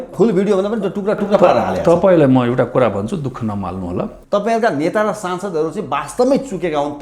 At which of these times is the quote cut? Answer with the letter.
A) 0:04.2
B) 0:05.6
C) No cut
A